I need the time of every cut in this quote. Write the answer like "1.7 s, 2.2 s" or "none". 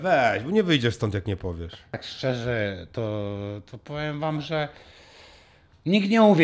2.1 s